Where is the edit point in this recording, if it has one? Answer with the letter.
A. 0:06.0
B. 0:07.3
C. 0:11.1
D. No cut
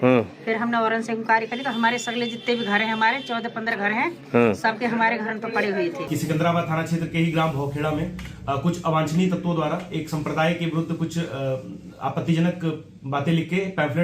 A